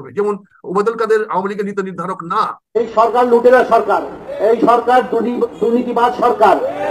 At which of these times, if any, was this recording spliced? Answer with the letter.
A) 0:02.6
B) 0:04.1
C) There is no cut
A